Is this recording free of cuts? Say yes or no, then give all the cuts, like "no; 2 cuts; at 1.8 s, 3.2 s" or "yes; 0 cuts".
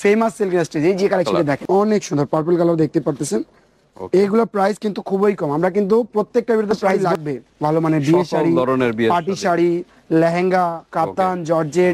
no; 2 cuts; at 1.4 s, 6.9 s